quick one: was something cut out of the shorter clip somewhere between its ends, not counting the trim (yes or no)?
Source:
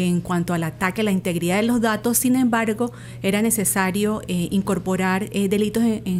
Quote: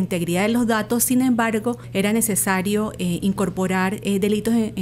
yes